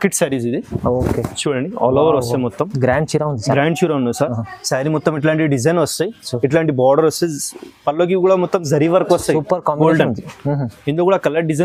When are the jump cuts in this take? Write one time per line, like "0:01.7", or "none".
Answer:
none